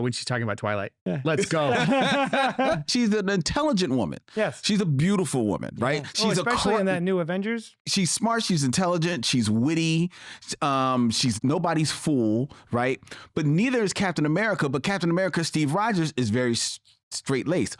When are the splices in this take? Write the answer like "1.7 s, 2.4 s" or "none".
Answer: 2.9 s, 7.9 s, 11.4 s

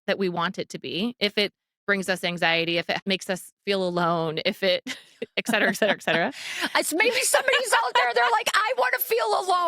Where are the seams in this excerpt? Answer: 3.0 s

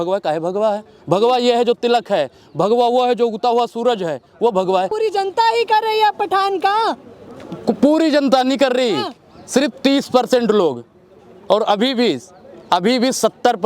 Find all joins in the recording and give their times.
4.9 s

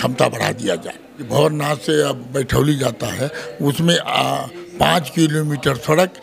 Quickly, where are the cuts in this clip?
1.3 s

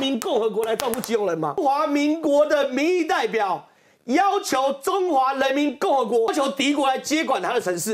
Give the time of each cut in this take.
1.6 s, 6.3 s

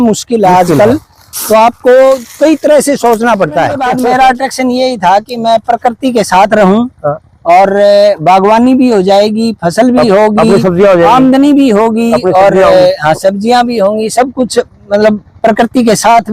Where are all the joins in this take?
3.8 s

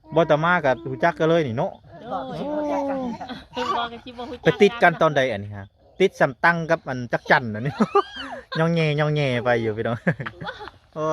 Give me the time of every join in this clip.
none

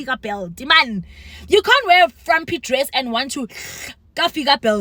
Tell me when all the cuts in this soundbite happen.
none

